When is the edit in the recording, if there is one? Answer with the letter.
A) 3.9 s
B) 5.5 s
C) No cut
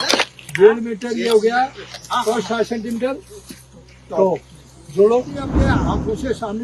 B